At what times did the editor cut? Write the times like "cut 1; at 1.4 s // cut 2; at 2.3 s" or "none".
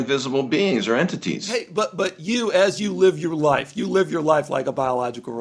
none